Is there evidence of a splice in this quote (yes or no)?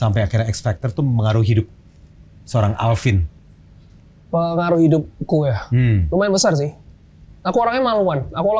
no